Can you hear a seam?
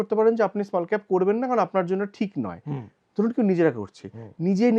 no; 0 cuts

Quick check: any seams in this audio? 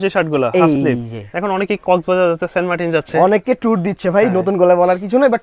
no; 0 cuts

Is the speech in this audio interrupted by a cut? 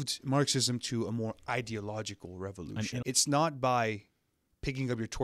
yes; 1 cut; at 3.0 s

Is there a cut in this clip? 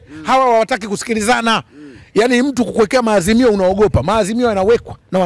no; 0 cuts

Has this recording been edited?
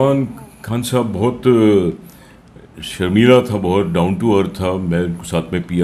no; 0 cuts

